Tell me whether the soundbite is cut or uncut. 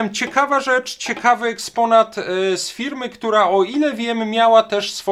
uncut